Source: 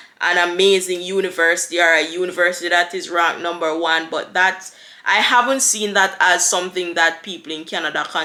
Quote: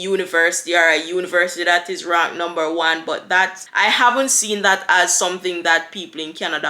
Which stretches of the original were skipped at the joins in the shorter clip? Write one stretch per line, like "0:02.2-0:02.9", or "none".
0:04.7-0:04.9